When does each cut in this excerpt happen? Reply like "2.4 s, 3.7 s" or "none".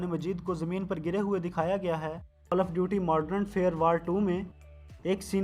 2.5 s